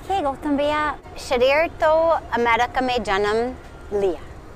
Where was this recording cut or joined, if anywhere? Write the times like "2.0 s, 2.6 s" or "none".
1.1 s